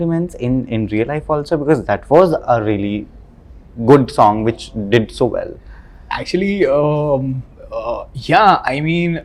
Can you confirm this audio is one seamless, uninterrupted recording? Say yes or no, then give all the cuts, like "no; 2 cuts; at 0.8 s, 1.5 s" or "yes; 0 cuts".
yes; 0 cuts